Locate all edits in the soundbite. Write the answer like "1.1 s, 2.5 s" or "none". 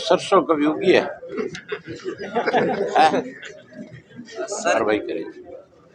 4.8 s